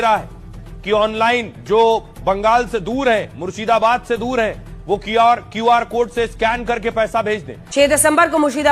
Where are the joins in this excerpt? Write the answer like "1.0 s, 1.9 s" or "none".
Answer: 7.5 s